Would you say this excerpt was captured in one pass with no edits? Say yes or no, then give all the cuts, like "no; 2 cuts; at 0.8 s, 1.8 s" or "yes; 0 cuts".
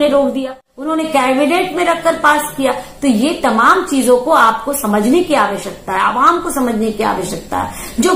yes; 0 cuts